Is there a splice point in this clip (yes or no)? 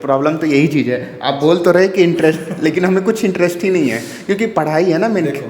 no